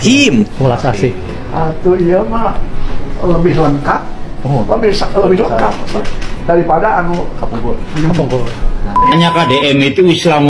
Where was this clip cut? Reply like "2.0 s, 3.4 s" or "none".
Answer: 9.1 s